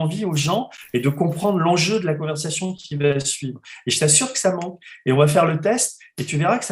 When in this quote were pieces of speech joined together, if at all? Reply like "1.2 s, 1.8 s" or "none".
none

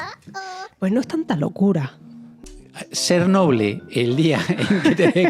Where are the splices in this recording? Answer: 2.4 s

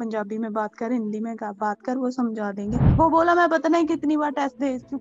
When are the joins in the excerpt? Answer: 2.9 s

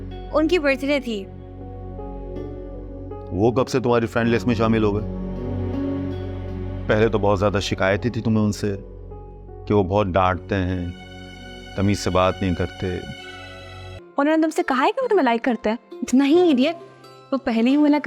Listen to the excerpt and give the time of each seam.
14.0 s

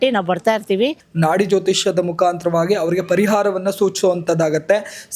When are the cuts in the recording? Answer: 1.0 s

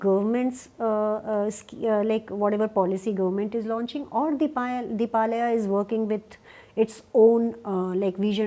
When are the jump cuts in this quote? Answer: none

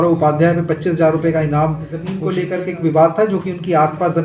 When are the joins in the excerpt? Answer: 2.1 s

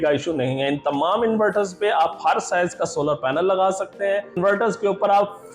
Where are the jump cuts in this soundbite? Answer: 4.4 s

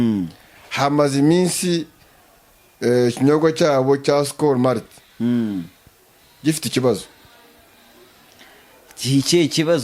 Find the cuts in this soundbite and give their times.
none

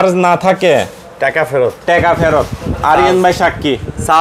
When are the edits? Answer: none

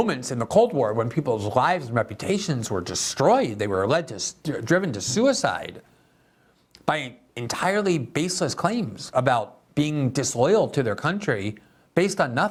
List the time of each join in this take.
none

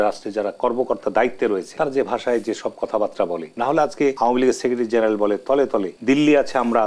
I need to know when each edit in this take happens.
1.7 s, 3.5 s, 4.2 s, 5.9 s

